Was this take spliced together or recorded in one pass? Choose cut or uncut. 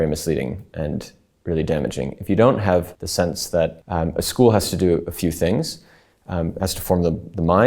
cut